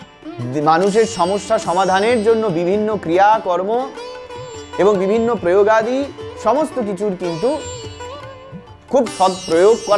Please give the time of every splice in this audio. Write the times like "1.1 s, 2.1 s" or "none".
none